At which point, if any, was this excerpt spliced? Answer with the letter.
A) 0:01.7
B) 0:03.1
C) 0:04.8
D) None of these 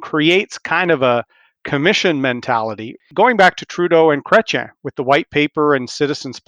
B